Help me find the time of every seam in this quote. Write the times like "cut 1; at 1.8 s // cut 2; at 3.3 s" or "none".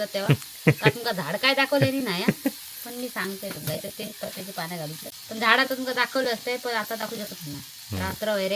cut 1; at 5.0 s